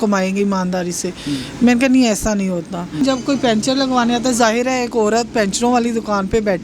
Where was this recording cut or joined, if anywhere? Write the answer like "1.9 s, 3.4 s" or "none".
3.0 s